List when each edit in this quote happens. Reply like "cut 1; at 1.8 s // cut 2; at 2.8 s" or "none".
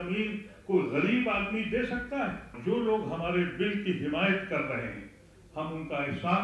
cut 1; at 2.6 s